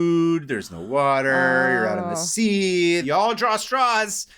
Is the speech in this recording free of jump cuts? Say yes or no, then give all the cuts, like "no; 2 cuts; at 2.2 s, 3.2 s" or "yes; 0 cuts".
no; 1 cut; at 3.0 s